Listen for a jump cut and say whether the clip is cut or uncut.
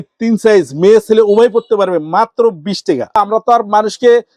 cut